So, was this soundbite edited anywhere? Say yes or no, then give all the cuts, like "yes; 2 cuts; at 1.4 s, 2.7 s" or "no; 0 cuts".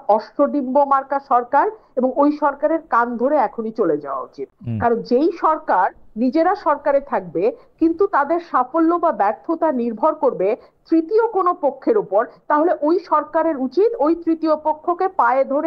no; 0 cuts